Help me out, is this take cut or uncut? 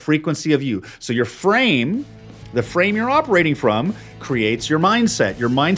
uncut